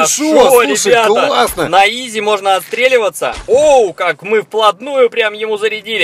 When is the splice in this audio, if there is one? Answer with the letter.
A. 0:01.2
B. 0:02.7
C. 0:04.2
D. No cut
D